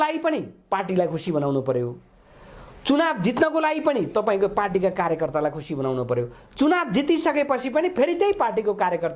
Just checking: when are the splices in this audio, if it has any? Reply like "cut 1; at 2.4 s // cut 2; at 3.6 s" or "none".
none